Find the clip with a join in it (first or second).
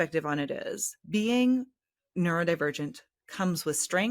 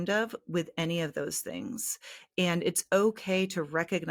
first